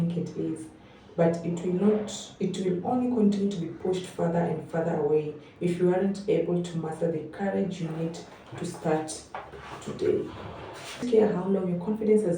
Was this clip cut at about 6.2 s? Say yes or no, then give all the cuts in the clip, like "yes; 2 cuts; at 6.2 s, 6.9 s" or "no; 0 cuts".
no; 1 cut; at 11.0 s